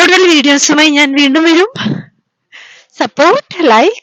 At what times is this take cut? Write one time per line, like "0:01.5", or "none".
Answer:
none

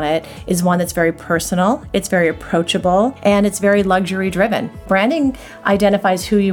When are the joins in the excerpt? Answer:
0:03.2
0:04.8

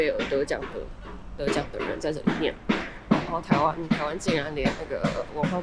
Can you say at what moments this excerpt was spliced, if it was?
none

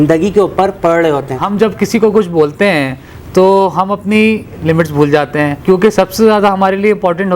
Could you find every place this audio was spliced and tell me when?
0:01.5

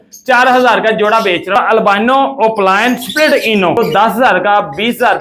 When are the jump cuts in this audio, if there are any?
0:01.5
0:03.8

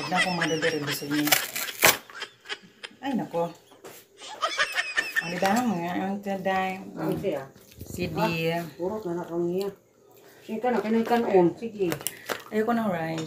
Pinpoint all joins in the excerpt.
none

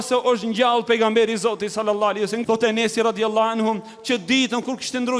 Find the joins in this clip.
0:02.4

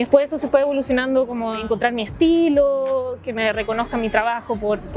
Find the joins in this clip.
0:01.6

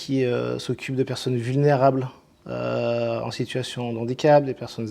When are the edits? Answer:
none

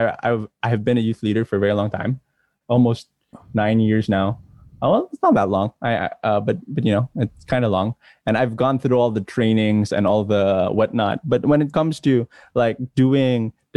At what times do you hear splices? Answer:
0:02.6

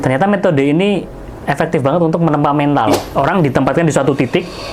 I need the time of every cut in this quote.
0:02.9

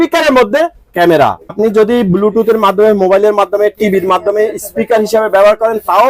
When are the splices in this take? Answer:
0:01.5

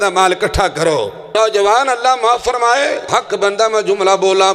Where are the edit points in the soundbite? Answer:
0:01.3
0:03.1

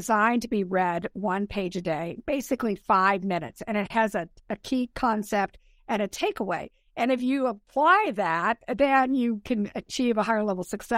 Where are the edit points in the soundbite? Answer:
0:07.7

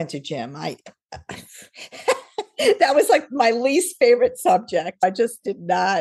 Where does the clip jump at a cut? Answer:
none

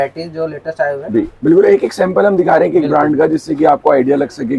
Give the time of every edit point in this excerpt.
none

